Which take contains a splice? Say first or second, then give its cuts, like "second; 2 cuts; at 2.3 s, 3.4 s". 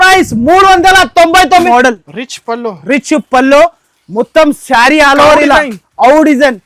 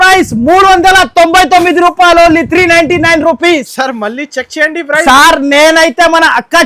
first; 1 cut; at 1.6 s